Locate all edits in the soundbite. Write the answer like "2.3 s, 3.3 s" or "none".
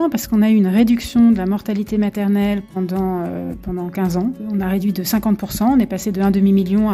4.4 s